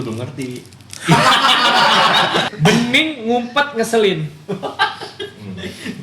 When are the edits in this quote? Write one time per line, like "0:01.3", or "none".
0:02.5